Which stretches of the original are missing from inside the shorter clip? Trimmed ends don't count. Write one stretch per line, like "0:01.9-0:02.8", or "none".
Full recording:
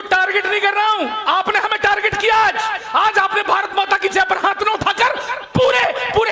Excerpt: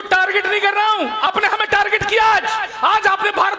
0:01.3-0:01.4